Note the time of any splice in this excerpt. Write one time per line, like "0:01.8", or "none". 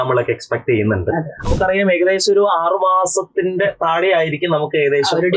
0:01.5

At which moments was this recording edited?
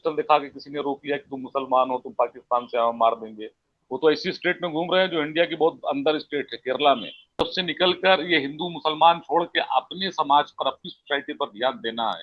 0:07.4

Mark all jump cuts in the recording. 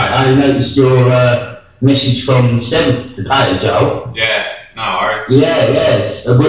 0:02.0

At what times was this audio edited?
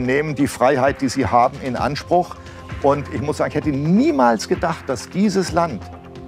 none

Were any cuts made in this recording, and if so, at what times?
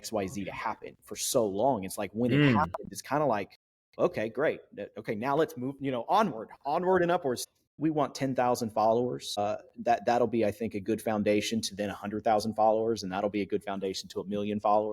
0:07.8

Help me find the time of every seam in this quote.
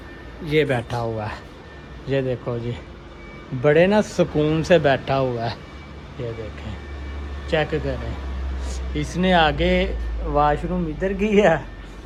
none

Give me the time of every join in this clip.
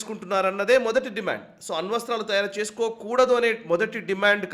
none

